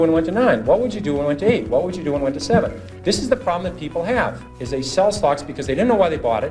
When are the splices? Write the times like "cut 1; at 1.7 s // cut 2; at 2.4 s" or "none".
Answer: cut 1; at 4.5 s